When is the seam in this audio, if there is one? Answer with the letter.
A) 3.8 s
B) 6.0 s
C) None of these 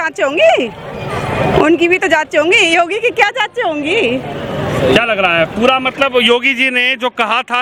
C